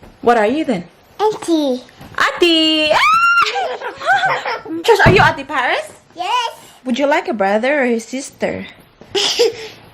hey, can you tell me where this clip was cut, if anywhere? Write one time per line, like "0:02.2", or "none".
0:04.8

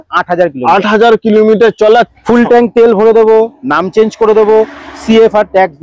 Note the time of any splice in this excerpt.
0:02.1

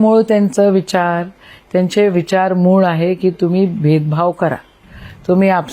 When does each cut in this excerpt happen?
none

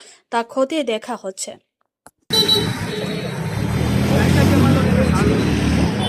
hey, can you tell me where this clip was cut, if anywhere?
0:02.3

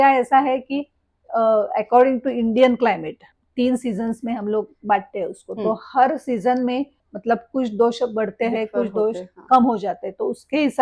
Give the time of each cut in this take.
0:03.4
0:07.1

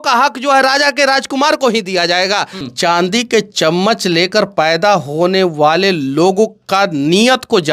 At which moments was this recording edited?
0:02.6

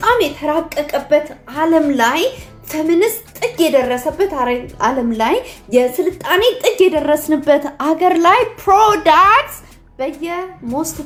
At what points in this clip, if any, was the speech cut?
none

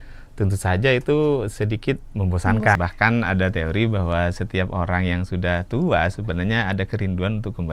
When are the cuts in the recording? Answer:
0:02.8

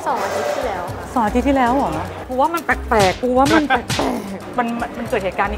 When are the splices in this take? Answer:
0:02.2
0:04.4

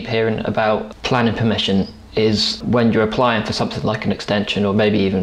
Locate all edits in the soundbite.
0:00.9
0:02.6

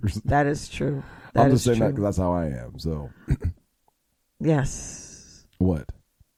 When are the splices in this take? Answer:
none

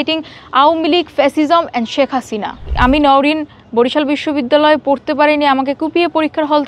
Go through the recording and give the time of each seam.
0:02.7

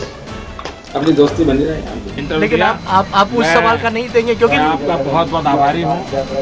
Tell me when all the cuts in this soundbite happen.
0:02.2

